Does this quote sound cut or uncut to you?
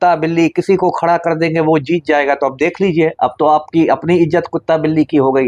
uncut